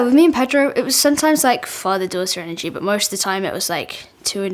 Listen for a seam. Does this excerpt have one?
no; 0 cuts

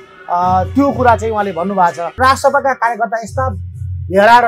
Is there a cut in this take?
yes; 1 cut; at 2.2 s

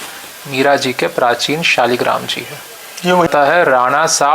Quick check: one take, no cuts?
no; 1 cut; at 3.3 s

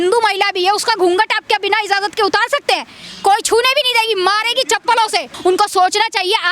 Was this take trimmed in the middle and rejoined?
yes; 1 cut; at 5.3 s

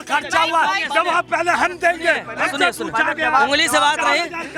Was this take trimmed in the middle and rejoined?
no; 0 cuts

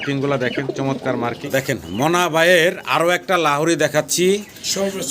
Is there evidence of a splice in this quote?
yes; 1 cut; at 1.4 s

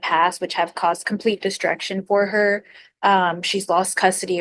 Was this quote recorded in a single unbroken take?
yes; 0 cuts

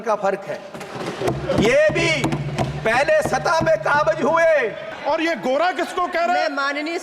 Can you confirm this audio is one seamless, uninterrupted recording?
no; 1 cut; at 4.9 s

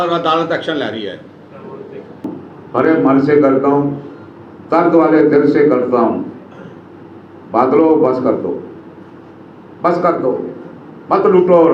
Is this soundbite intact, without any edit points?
no; 1 cut; at 2.3 s

